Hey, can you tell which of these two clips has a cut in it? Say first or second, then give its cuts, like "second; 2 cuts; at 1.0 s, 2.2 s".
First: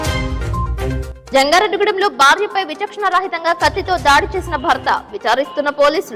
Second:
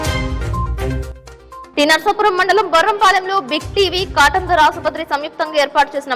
second; 1 cut; at 1.1 s